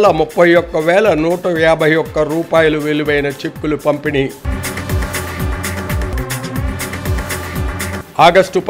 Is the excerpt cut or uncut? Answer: uncut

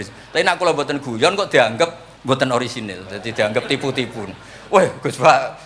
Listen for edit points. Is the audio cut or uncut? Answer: cut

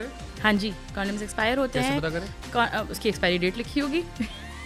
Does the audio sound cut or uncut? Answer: uncut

